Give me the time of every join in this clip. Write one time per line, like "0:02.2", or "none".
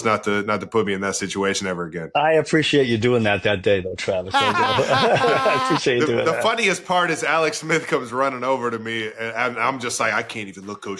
0:02.0

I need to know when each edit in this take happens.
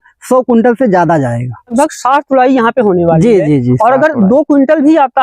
0:01.7

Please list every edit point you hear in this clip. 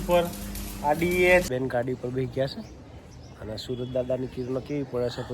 0:01.5

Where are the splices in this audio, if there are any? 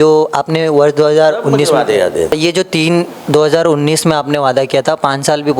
0:02.4

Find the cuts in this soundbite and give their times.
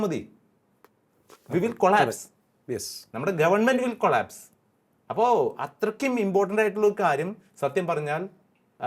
none

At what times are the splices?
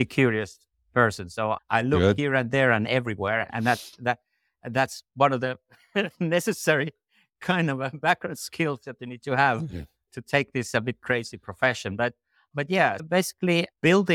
none

